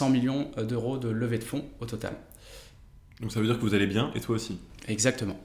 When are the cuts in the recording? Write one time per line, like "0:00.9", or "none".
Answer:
none

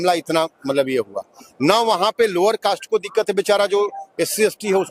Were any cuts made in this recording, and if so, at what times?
none

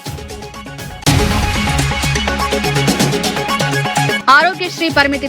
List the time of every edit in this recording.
0:01.0
0:04.2

